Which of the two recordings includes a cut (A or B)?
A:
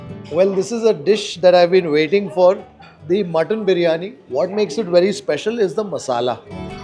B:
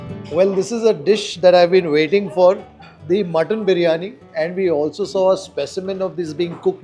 A